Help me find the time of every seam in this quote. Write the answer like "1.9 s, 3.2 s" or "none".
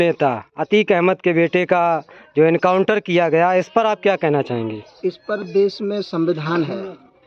none